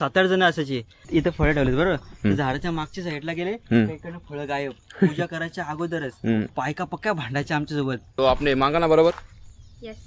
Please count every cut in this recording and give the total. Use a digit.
3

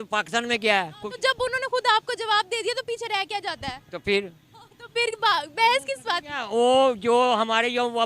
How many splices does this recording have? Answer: 0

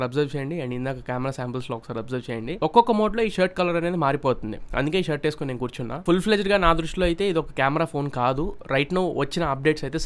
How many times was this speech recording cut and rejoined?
0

